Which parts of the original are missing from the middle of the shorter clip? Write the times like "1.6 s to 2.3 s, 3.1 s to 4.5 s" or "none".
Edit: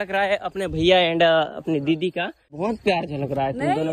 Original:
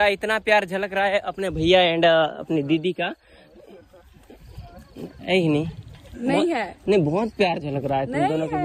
3.4 s to 7.1 s